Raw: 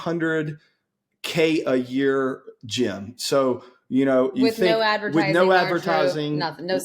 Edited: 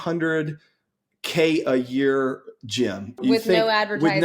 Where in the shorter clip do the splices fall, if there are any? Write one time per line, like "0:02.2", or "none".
0:03.2